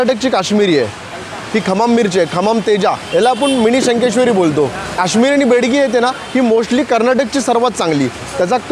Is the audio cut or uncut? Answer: cut